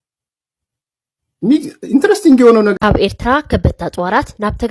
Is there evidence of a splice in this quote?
yes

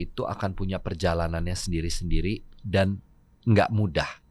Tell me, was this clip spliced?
no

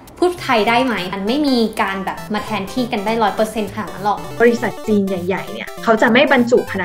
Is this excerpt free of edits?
no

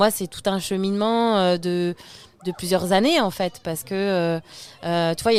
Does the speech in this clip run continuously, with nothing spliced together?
yes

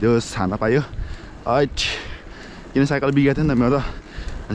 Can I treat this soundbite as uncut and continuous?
yes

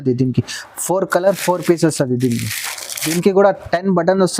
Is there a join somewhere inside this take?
yes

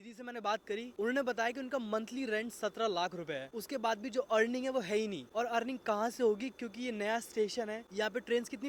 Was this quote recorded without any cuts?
yes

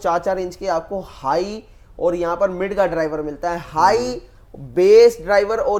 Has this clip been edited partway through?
no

